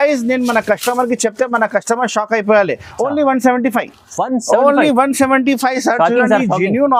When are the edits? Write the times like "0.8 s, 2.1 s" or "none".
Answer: none